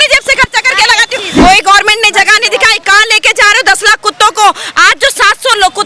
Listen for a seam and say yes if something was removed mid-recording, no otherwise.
yes